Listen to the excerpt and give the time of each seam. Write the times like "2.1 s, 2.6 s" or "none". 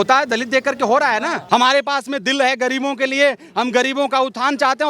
1.4 s